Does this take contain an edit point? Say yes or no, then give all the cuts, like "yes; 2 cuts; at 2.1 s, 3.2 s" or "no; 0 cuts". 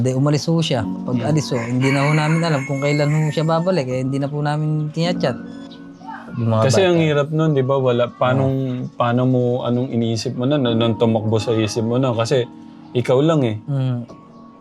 yes; 1 cut; at 5.7 s